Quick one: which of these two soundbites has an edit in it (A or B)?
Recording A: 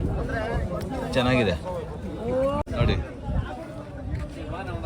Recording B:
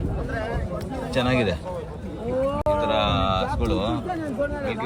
A